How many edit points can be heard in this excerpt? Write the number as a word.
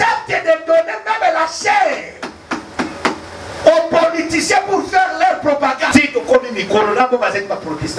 one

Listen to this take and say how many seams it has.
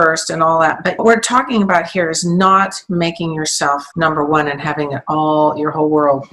one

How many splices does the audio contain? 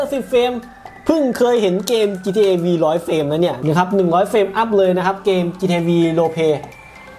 one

